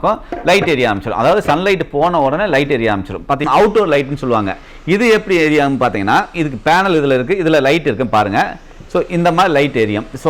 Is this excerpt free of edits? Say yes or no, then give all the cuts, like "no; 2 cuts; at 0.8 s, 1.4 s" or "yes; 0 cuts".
no; 1 cut; at 3.4 s